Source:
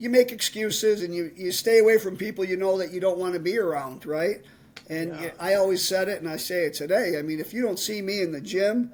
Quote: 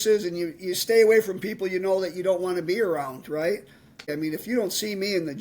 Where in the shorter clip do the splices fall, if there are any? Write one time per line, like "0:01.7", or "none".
0:04.1